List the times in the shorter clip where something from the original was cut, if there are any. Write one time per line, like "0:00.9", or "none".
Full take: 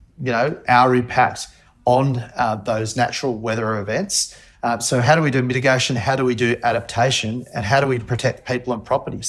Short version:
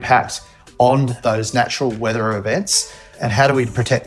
0:01.2
0:03.1